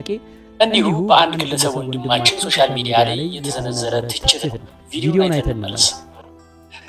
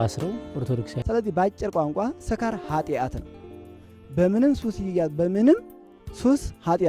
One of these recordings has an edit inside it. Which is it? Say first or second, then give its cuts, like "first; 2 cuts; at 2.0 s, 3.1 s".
second; 1 cut; at 0.9 s